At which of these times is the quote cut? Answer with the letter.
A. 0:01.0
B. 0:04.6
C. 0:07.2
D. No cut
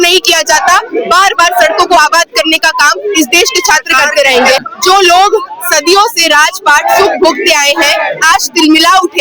B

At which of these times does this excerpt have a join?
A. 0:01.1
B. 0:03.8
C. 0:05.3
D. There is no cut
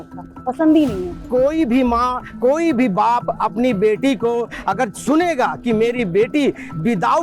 A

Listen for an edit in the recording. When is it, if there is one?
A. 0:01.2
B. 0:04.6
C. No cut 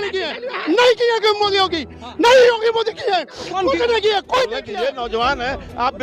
B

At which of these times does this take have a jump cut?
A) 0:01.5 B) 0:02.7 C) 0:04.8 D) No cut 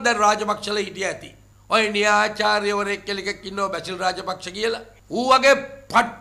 D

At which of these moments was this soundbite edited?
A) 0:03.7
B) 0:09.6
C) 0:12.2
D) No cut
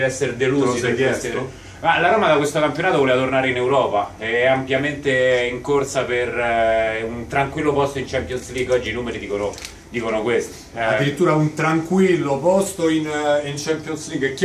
D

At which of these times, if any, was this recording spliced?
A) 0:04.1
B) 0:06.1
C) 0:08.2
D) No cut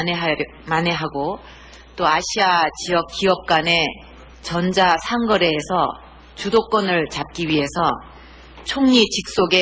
D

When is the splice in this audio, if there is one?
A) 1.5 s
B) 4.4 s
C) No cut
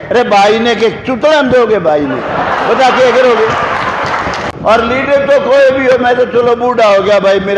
B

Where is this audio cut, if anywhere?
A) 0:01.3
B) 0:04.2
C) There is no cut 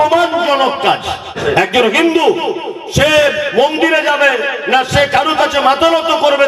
A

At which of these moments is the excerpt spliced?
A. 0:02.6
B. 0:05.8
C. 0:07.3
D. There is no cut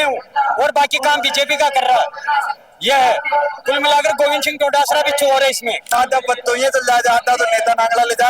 B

